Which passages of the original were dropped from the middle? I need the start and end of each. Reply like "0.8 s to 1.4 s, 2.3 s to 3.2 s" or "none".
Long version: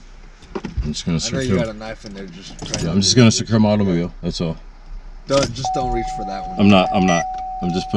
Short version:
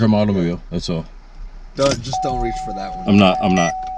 none